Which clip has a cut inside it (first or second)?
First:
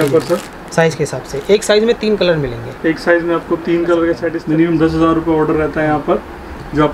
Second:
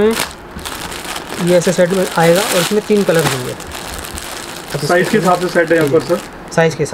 first